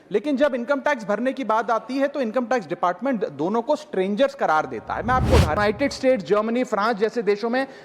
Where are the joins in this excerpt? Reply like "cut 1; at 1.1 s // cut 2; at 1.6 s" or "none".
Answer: cut 1; at 5.6 s